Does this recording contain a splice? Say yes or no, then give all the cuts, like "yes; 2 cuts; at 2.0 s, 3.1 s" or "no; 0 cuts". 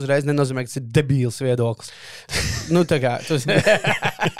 no; 0 cuts